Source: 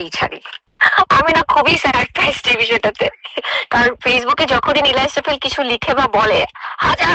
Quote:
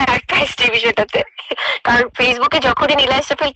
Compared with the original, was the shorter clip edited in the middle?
no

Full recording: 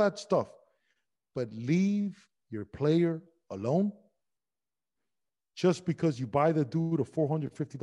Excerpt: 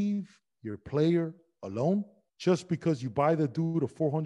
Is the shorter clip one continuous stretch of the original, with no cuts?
no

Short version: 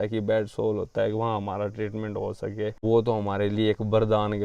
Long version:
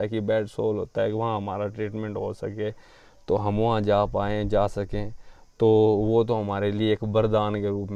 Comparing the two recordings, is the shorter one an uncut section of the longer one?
no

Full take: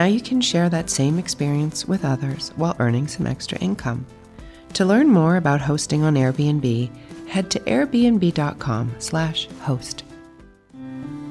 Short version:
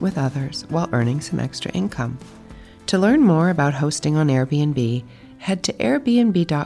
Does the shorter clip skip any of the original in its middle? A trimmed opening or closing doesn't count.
no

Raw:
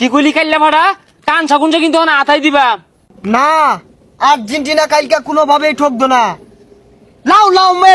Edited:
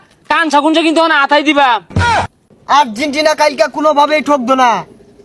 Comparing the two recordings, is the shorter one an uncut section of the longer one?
no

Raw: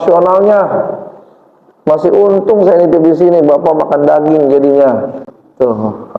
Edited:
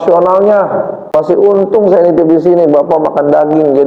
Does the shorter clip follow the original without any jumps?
no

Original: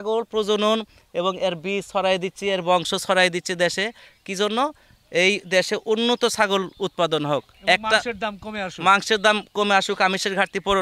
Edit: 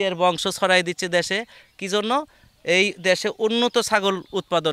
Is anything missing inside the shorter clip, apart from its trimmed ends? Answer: no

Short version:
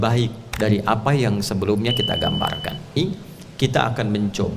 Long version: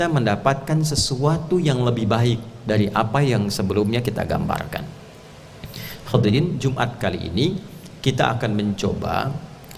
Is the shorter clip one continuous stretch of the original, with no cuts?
no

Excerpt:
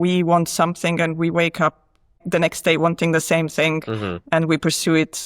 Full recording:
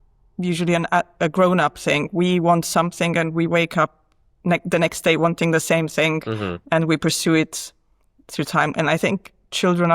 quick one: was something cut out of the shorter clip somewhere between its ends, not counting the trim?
yes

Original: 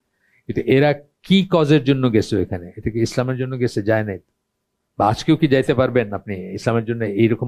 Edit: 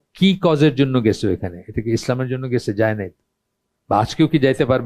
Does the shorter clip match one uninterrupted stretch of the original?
yes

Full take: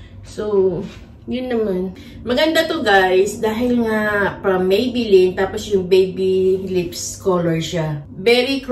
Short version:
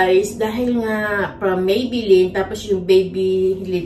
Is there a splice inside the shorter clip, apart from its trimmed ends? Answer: no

